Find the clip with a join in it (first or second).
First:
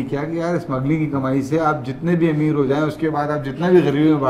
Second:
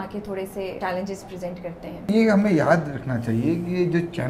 second